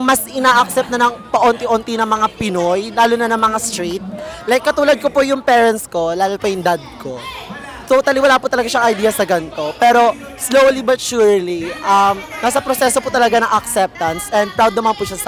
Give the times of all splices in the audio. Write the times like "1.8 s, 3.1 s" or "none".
none